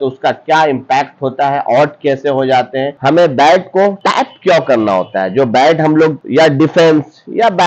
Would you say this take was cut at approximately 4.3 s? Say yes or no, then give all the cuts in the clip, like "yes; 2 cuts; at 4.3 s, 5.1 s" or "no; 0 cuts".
no; 2 cuts; at 3.0 s, 6.2 s